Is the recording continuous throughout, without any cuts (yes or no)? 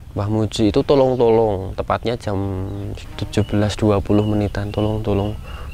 no